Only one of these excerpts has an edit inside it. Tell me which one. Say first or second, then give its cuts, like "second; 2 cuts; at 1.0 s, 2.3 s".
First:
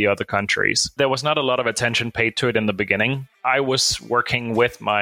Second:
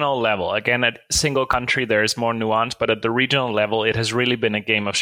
first; 2 cuts; at 0.8 s, 3.4 s